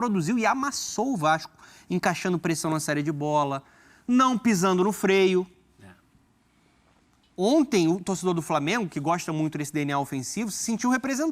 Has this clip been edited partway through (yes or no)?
no